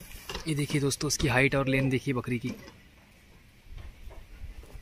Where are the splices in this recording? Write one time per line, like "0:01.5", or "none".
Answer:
none